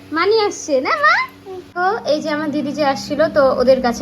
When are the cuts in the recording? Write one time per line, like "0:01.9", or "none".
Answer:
0:01.8